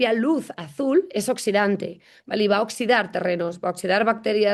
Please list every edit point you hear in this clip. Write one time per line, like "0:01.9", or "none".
none

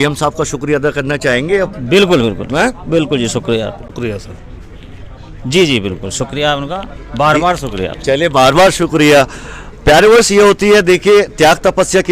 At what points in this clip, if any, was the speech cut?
0:03.9

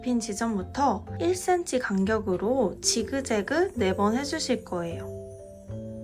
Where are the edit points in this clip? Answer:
0:01.1

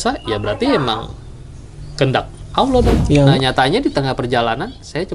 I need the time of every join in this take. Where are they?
0:03.4

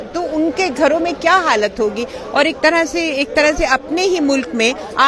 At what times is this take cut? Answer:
none

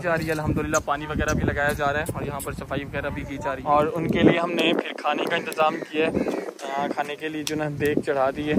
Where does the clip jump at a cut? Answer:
0:03.6

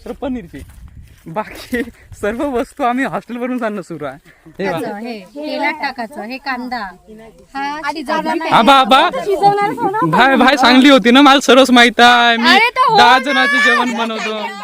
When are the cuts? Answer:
0:04.7

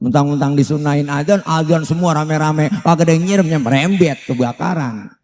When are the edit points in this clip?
none

